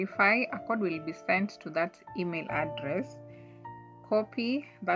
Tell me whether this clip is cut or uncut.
uncut